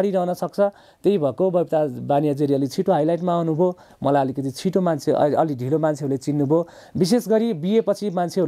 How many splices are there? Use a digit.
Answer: 0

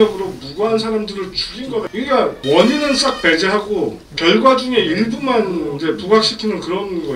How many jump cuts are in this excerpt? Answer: 1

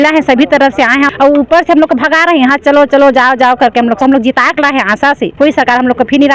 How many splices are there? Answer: 3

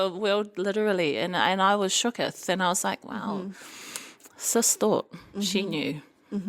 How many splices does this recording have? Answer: 0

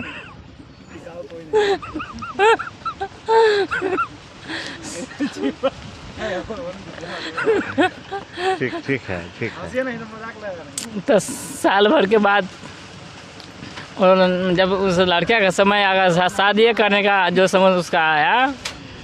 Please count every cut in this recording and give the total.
0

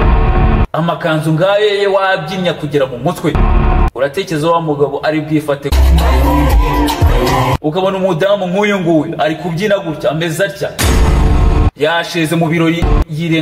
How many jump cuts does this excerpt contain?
1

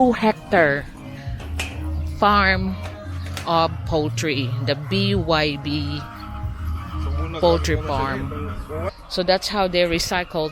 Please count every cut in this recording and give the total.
1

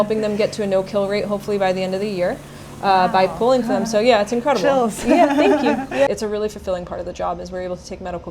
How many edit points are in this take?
1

